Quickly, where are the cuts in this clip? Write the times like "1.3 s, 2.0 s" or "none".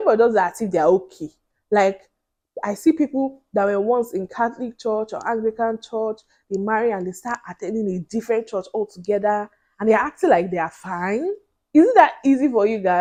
none